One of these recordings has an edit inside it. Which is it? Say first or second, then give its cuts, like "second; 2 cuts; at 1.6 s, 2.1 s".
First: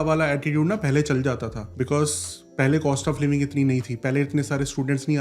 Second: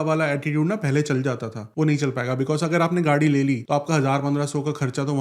second; 1 cut; at 1.6 s